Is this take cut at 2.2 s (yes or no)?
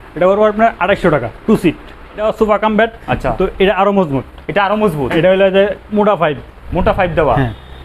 yes